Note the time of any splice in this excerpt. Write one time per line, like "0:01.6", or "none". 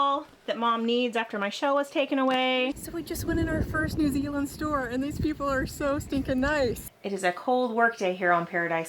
0:02.8
0:07.0